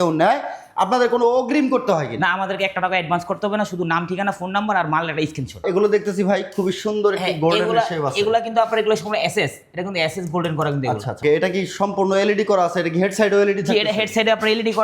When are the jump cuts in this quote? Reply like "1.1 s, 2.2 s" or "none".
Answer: 5.6 s, 11.2 s